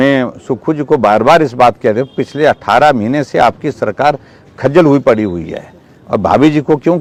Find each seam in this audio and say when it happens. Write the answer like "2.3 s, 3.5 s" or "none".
none